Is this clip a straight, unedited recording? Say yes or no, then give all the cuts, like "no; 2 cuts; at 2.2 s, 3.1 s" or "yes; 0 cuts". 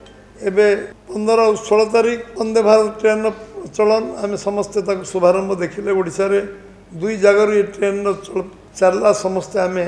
no; 3 cuts; at 1.0 s, 2.3 s, 8.6 s